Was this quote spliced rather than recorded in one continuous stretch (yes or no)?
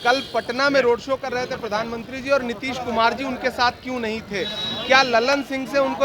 no